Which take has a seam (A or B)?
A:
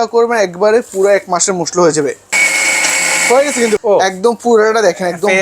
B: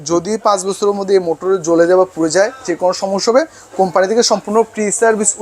A